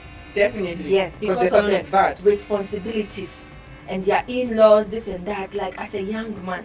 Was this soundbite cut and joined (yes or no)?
no